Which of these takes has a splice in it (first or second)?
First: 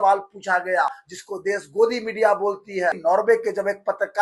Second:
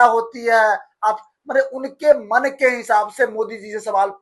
first